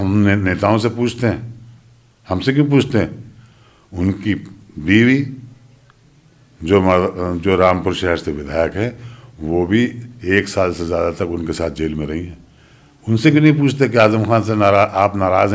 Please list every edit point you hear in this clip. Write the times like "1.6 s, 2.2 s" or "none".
none